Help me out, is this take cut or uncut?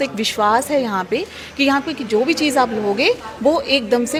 uncut